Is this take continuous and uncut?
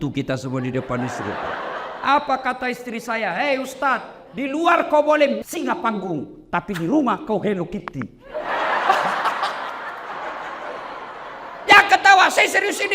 no; 1 cut; at 10.1 s

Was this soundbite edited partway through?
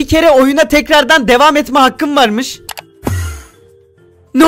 no; 0 cuts

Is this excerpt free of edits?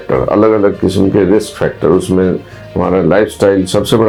yes; 0 cuts

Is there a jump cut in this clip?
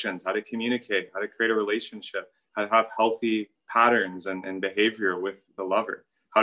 yes; 2 cuts; at 3.6 s, 5.5 s

